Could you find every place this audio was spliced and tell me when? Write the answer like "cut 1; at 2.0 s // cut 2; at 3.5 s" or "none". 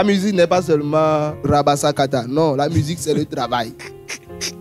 cut 1; at 1.4 s